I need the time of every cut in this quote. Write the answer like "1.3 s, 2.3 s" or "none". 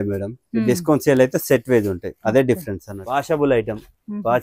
2.9 s